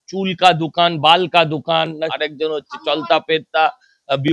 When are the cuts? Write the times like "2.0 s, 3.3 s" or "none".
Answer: 2.1 s

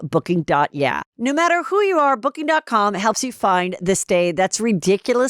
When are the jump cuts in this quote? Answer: 1.1 s

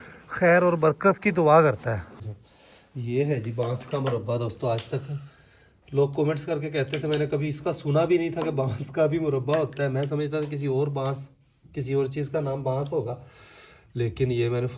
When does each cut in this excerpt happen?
2.1 s

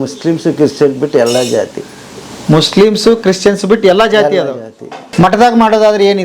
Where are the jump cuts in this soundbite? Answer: 5.1 s

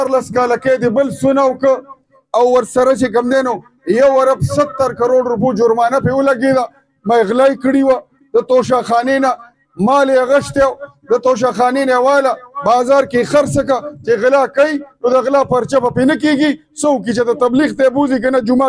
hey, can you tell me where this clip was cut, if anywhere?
none

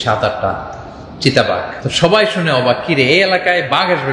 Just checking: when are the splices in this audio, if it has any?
1.8 s

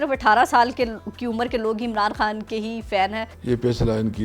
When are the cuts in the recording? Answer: 3.3 s

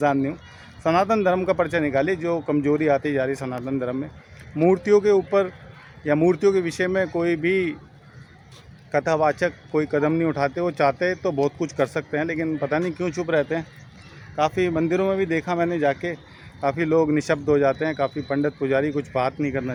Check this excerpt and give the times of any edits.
none

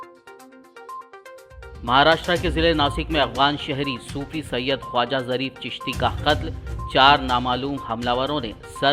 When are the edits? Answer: 0.9 s

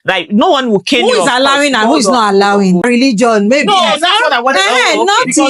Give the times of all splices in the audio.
2.8 s

